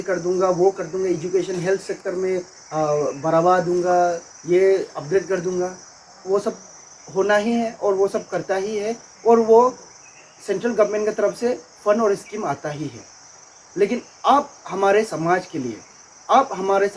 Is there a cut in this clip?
no; 0 cuts

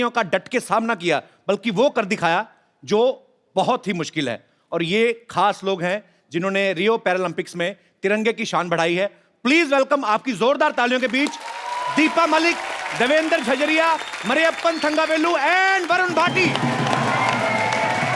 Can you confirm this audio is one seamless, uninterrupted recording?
yes; 0 cuts

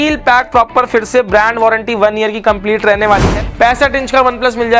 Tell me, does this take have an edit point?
yes; 1 cut; at 3.3 s

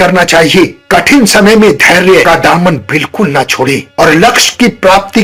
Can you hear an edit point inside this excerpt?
no; 0 cuts

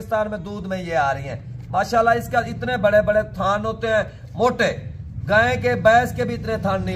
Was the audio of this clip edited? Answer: no; 0 cuts

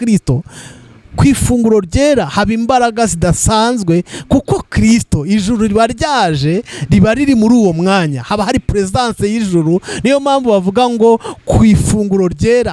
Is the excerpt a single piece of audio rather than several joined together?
yes; 0 cuts

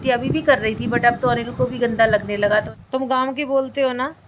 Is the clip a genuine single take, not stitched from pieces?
no; 1 cut; at 2.5 s

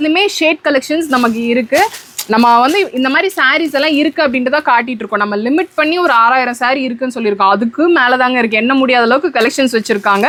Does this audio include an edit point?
no; 0 cuts

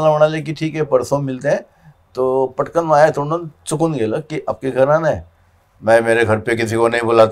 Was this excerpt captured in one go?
yes; 0 cuts

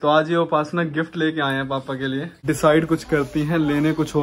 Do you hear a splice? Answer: yes; 1 cut; at 2.3 s

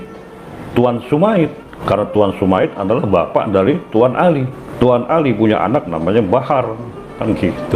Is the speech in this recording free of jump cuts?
no; 2 cuts; at 1.7 s, 4.6 s

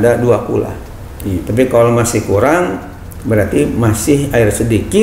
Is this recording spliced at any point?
no; 0 cuts

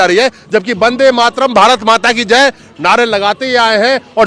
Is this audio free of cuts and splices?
yes; 0 cuts

